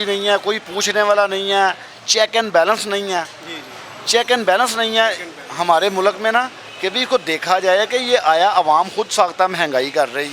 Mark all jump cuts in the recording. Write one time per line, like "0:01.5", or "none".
none